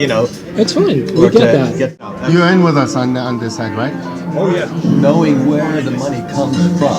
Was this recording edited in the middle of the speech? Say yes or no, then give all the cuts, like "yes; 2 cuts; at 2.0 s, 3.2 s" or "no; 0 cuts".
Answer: yes; 1 cut; at 1.9 s